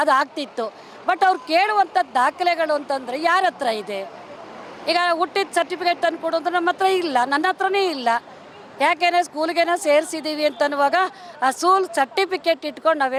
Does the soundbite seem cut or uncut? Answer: uncut